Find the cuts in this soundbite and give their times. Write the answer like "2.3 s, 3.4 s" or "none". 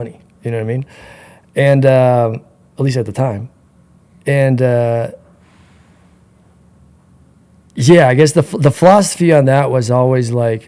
none